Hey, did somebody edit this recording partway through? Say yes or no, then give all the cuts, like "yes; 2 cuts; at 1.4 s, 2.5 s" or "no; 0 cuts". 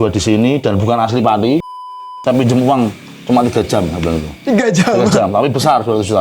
yes; 1 cut; at 1.7 s